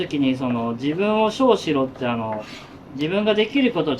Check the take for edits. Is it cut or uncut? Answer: uncut